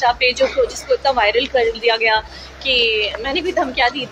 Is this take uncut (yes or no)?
yes